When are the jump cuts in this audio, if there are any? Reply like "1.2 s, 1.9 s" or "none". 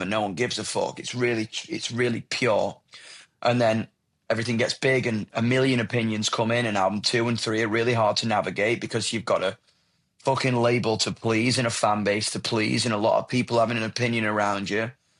none